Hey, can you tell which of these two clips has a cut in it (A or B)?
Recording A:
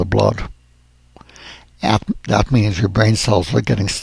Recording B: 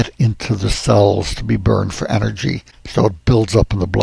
B